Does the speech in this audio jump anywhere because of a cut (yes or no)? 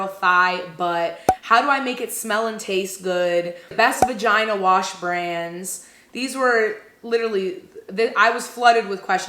yes